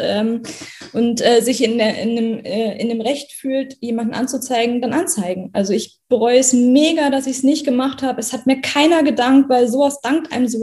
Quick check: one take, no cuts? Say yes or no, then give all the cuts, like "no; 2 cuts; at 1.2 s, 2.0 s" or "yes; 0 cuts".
yes; 0 cuts